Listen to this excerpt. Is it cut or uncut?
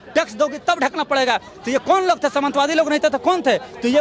uncut